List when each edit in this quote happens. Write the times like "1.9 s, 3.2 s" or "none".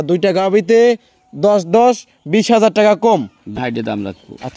3.6 s